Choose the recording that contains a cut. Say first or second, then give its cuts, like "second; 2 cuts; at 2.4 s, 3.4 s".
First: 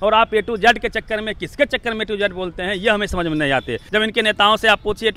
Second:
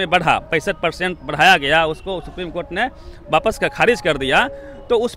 first; 1 cut; at 3.8 s